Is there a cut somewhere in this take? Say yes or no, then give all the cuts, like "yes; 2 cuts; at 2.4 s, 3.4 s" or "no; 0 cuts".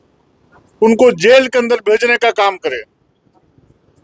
no; 0 cuts